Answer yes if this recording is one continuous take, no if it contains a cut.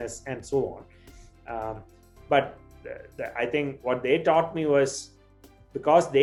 yes